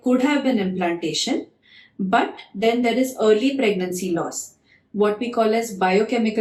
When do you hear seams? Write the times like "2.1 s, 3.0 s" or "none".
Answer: none